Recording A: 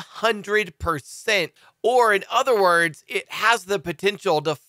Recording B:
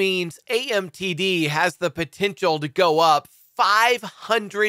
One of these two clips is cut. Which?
A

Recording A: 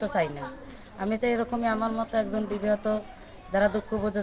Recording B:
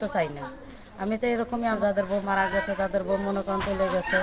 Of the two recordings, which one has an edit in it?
B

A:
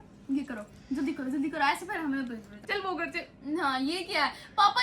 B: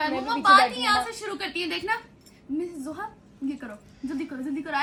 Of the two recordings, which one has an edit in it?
A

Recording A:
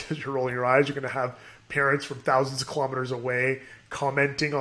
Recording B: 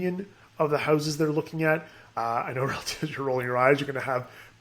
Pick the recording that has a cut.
B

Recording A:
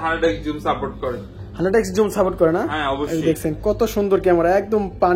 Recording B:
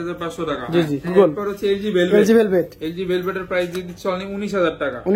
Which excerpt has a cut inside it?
B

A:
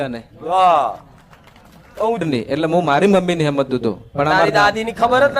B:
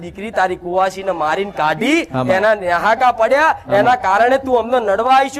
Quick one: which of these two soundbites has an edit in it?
A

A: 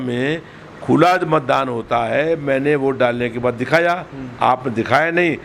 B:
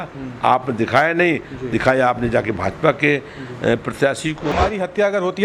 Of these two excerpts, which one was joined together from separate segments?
B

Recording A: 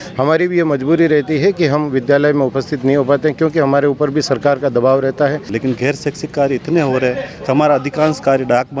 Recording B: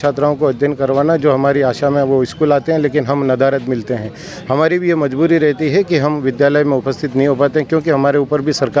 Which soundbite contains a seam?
A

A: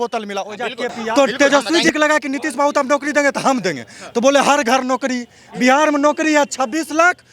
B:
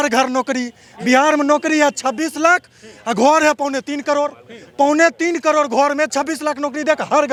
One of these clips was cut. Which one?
A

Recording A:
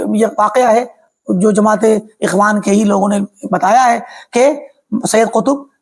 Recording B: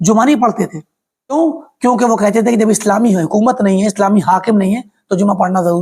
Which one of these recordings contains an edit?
B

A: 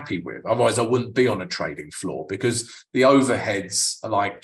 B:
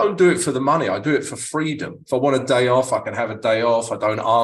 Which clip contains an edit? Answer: B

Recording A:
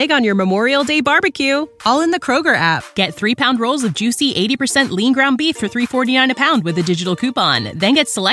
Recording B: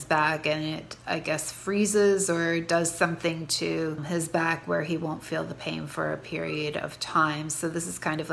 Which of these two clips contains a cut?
B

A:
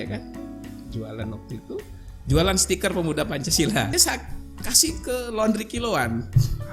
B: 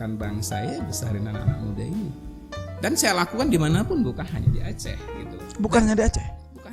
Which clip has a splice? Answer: A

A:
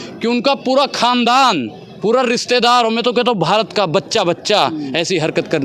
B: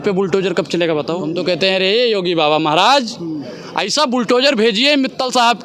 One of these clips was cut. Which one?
B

